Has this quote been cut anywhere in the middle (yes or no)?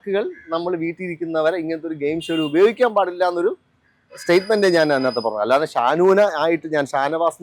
no